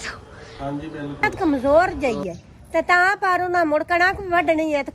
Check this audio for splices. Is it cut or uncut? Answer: cut